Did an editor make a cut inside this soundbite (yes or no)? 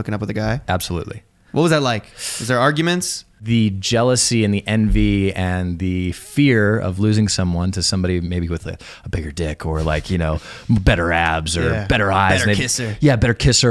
yes